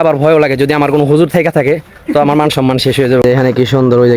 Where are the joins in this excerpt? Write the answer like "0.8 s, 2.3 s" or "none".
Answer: 3.2 s